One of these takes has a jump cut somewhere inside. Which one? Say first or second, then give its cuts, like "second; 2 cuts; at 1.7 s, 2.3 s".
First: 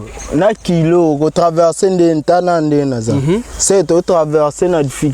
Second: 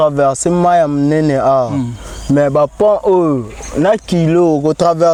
first; 1 cut; at 3.5 s